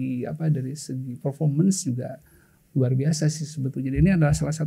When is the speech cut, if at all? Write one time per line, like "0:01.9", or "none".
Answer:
none